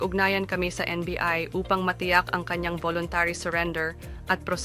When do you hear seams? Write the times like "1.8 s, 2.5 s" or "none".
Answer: 3.7 s